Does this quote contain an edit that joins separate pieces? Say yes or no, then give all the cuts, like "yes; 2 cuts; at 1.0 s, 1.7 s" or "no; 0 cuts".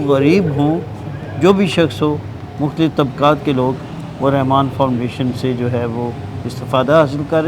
no; 0 cuts